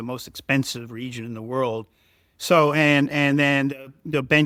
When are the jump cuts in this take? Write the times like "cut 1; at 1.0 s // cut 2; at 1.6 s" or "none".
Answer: none